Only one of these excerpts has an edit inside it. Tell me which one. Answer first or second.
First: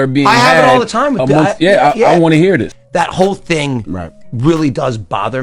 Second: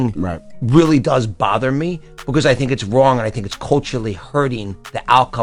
first